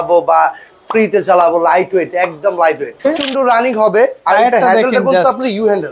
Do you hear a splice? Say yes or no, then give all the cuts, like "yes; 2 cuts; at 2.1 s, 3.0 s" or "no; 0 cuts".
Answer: yes; 1 cut; at 3.1 s